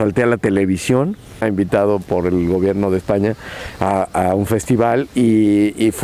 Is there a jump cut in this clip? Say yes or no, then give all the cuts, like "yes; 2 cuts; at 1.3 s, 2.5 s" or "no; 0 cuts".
yes; 1 cut; at 1.4 s